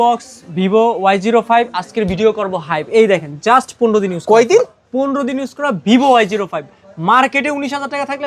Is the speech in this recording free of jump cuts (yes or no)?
yes